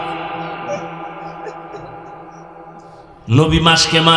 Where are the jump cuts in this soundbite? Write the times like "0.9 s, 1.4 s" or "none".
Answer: 3.1 s